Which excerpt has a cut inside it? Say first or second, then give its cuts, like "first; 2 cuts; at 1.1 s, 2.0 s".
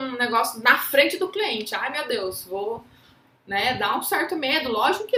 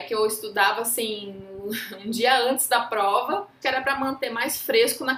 second; 1 cut; at 3.5 s